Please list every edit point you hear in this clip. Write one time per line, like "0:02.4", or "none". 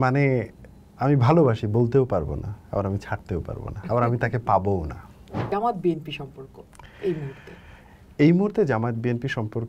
0:05.5